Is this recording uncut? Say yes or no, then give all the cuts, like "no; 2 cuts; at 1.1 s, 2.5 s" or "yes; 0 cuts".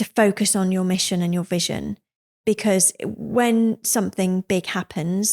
no; 1 cut; at 2.4 s